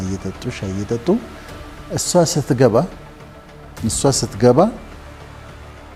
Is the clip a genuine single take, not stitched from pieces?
yes; 0 cuts

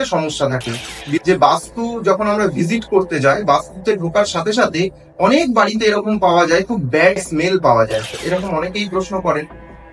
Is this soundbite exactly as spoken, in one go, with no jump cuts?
no; 2 cuts; at 1.2 s, 8.2 s

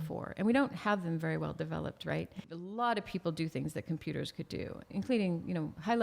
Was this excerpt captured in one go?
no; 2 cuts; at 2.5 s, 4.9 s

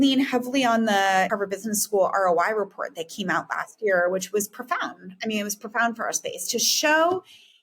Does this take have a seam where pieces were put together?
yes; 1 cut; at 1.3 s

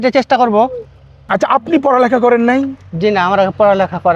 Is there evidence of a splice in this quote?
yes; 1 cut; at 1.2 s

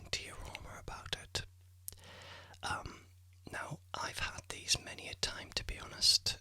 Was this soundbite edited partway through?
no; 0 cuts

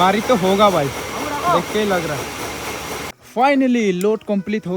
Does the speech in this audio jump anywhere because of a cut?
yes; 1 cut; at 3.1 s

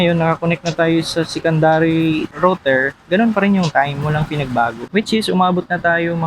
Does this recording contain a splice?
yes; 2 cuts; at 2.3 s, 4.8 s

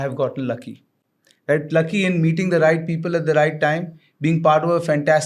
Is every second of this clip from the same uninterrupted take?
yes; 0 cuts

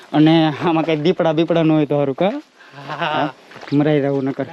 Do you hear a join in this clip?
no; 0 cuts

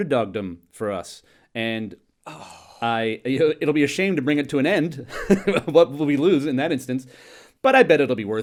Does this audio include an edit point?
no; 0 cuts

